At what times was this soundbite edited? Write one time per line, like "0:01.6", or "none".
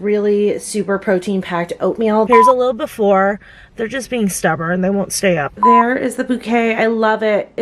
0:02.3
0:05.5

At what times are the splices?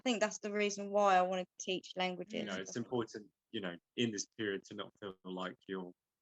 0:02.6

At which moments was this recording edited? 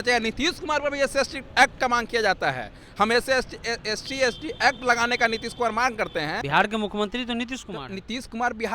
0:06.4

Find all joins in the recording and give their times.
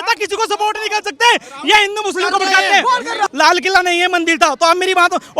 0:03.3

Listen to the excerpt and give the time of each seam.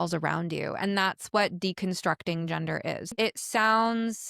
0:03.1

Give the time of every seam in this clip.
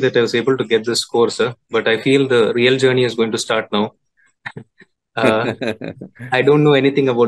none

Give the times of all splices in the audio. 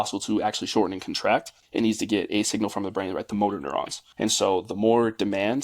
0:01.6
0:04.0

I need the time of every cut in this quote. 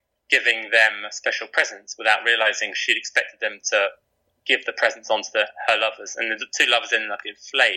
none

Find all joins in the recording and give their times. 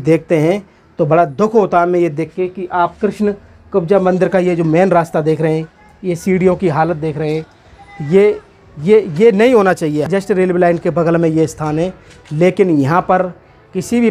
0:10.1

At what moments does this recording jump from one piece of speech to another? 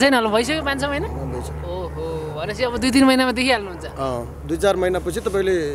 none

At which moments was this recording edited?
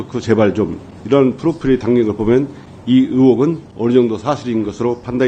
none

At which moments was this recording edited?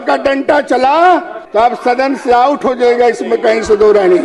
0:01.4

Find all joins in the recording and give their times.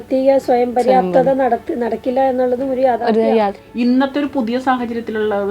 0:03.6

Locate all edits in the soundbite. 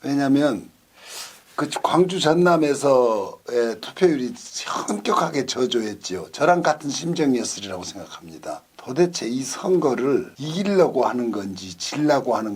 0:08.7
0:10.4

